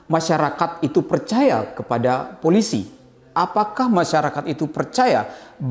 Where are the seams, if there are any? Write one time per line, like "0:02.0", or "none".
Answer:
none